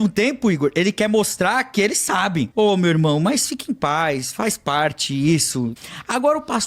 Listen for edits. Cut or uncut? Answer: cut